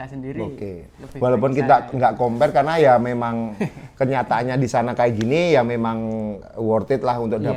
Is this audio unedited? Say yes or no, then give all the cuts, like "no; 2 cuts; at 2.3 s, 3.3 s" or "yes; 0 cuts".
yes; 0 cuts